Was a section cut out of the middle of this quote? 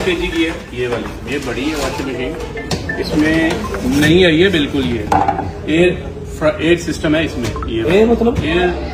no; 0 cuts

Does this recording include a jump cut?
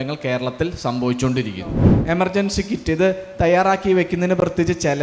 yes; 1 cut; at 1.9 s

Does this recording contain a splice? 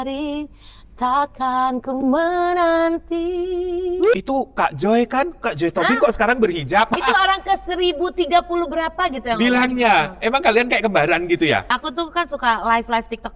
yes; 3 cuts; at 4.1 s, 7.0 s, 11.8 s

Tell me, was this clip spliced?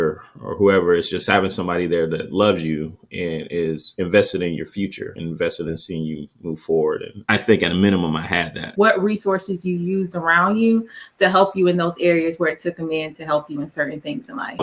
yes; 1 cut; at 8.8 s

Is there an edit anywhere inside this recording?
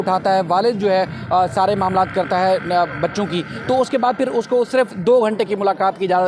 no; 0 cuts

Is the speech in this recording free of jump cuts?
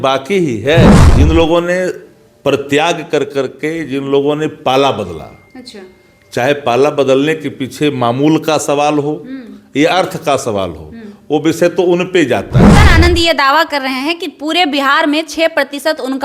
no; 2 cuts; at 1.0 s, 12.7 s

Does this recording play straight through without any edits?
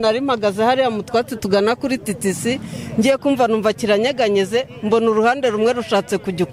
yes; 0 cuts

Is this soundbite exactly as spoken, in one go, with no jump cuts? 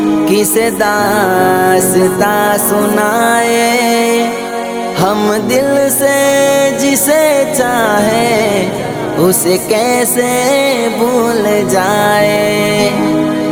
yes; 0 cuts

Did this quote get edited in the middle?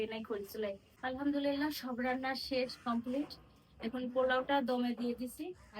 yes; 1 cut; at 0.9 s

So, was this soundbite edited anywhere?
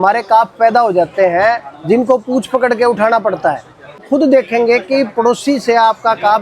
yes; 1 cut; at 4.0 s

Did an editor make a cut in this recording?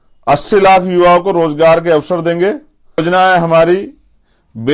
yes; 1 cut; at 3.0 s

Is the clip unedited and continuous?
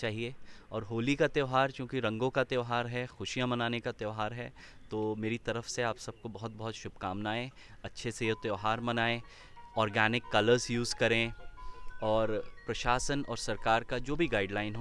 yes; 0 cuts

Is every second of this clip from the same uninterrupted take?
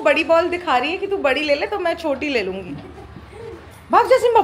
yes; 0 cuts

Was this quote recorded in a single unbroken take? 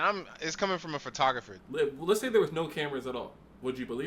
no; 1 cut; at 1.5 s

